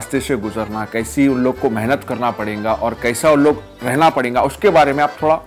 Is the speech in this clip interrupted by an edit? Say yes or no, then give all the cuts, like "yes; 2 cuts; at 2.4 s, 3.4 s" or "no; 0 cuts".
no; 0 cuts